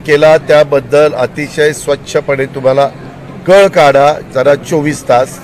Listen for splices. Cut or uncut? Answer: uncut